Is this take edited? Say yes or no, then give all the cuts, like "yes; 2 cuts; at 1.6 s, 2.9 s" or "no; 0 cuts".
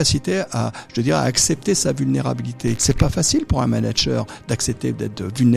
yes; 1 cut; at 2.8 s